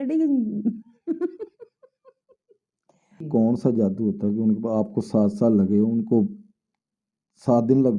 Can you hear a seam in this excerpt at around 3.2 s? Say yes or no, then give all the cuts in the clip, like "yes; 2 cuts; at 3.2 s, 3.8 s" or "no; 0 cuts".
yes; 1 cut; at 3.2 s